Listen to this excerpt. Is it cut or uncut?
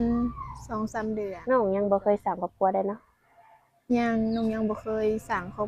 cut